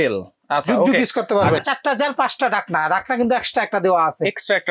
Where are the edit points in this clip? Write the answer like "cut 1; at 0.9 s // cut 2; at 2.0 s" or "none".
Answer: cut 1; at 1.6 s